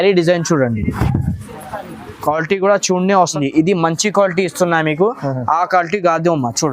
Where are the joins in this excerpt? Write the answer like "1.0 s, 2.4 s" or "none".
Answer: 3.3 s